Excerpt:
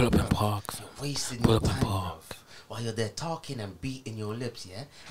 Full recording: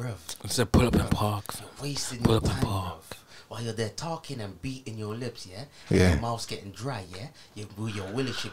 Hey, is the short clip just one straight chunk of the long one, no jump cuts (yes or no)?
yes